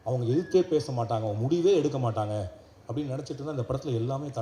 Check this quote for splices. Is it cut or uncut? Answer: uncut